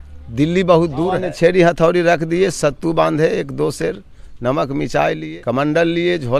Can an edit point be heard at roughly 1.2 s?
yes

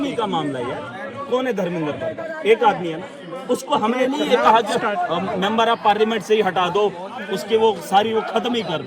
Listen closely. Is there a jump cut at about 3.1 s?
no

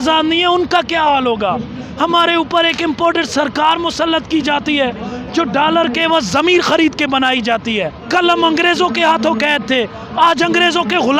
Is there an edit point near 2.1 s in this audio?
no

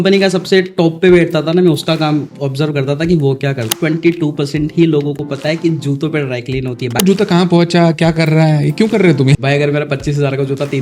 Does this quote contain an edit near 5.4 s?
no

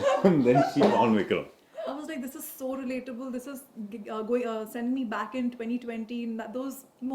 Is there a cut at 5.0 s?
no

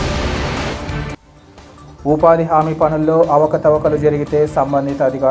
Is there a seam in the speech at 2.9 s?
no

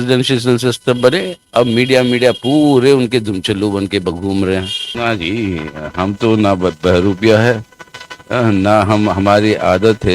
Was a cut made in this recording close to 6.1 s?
no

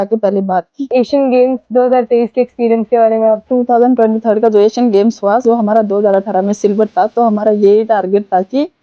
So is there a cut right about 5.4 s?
yes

